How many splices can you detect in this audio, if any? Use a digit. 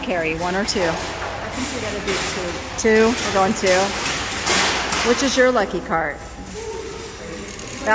0